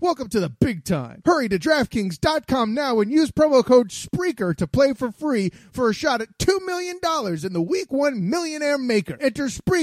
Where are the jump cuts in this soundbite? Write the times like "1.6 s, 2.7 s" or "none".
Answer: none